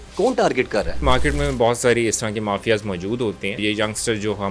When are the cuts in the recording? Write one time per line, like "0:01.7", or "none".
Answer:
0:01.0
0:03.6